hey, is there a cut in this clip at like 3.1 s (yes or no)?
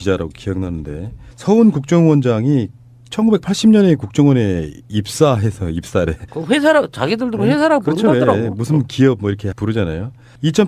no